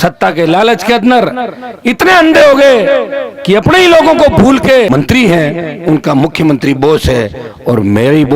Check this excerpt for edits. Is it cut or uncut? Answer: cut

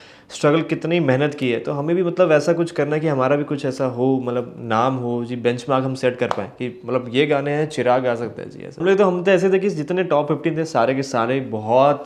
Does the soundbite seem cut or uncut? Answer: cut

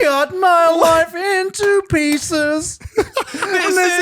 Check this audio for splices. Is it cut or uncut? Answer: uncut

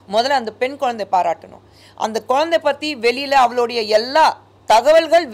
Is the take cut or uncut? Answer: uncut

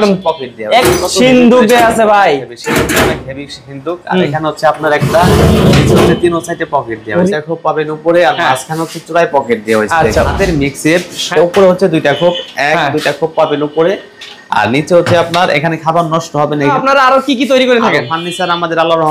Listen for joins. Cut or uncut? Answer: cut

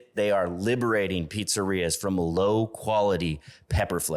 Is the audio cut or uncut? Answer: uncut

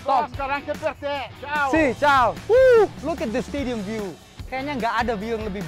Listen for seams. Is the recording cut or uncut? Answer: cut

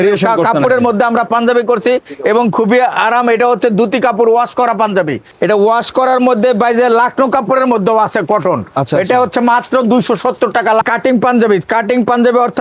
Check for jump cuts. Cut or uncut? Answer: uncut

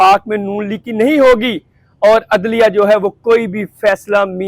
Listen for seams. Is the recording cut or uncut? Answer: uncut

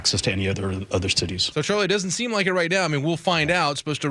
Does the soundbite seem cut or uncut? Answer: uncut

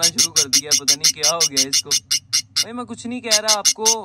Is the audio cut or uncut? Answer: uncut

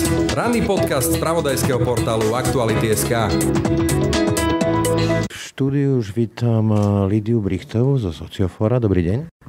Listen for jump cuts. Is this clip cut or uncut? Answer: uncut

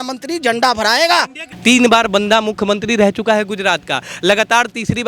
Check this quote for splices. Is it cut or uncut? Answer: cut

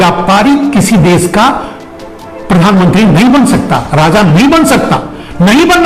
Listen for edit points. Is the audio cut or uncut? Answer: uncut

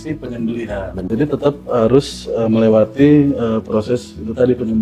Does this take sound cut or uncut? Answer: cut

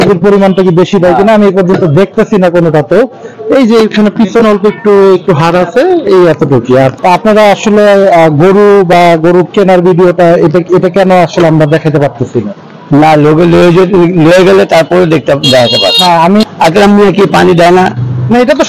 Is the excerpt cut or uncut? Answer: cut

